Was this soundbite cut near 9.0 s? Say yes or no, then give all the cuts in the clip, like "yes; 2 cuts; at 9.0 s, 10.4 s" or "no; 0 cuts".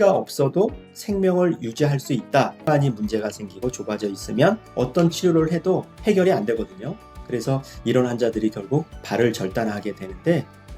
no; 1 cut; at 2.6 s